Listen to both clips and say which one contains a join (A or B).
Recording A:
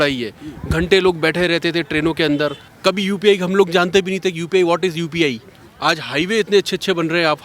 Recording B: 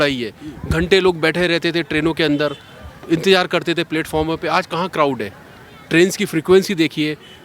A